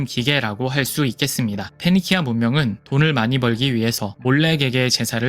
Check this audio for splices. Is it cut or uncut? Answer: cut